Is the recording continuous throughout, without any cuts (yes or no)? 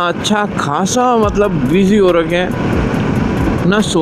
yes